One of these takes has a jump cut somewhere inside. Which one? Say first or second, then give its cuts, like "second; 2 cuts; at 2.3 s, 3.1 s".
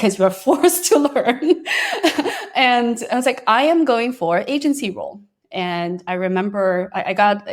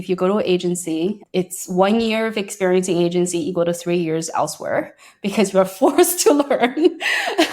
second; 1 cut; at 1.2 s